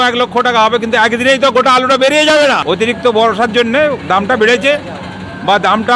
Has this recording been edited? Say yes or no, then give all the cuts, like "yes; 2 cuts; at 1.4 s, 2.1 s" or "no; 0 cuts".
yes; 1 cut; at 2.6 s